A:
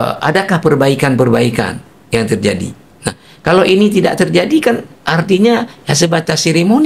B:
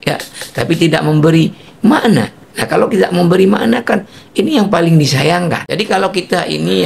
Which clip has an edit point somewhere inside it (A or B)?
B